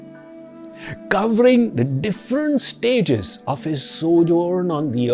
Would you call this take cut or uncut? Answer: uncut